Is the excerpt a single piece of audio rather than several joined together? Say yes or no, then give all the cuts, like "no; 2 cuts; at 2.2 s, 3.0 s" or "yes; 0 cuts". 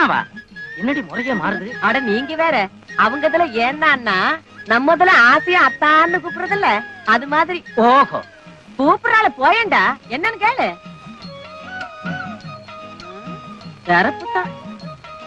yes; 0 cuts